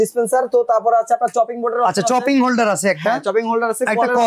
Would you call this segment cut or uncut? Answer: uncut